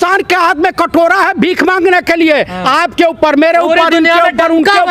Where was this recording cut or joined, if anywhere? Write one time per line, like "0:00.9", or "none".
none